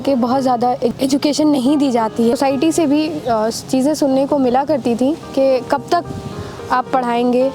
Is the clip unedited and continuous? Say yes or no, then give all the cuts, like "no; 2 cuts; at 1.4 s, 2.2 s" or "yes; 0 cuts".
no; 2 cuts; at 0.9 s, 2.3 s